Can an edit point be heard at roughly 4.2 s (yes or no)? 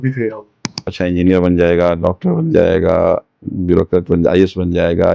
no